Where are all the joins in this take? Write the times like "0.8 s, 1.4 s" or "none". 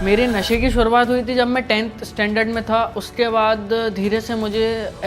none